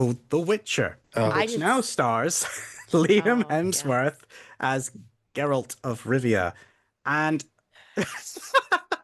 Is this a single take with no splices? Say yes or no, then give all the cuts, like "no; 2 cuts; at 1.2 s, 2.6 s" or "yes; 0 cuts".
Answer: no; 1 cut; at 1.0 s